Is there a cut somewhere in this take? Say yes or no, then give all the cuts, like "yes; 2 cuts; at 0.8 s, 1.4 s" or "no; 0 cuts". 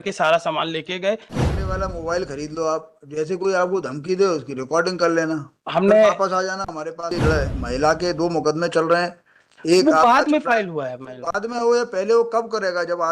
yes; 2 cuts; at 1.3 s, 7.1 s